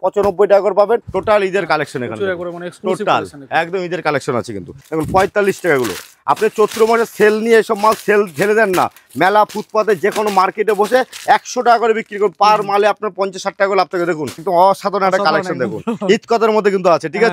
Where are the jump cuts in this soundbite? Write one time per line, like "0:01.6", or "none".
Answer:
0:01.1
0:04.8
0:14.4